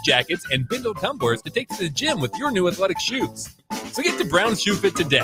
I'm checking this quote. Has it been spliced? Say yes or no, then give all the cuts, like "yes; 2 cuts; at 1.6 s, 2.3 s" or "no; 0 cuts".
no; 0 cuts